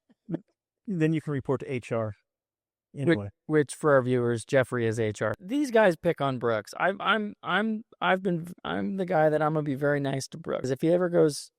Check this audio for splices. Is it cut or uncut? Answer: cut